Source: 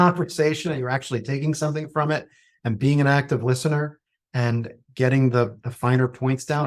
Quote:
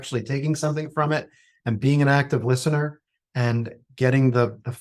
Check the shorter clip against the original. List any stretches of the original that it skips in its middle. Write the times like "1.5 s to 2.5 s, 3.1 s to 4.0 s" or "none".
none